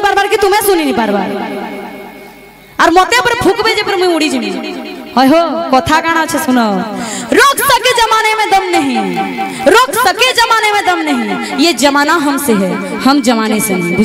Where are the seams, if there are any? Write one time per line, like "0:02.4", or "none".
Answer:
none